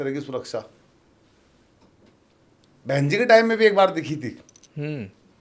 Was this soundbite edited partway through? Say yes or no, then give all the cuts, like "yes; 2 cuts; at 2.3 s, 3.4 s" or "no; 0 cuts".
no; 0 cuts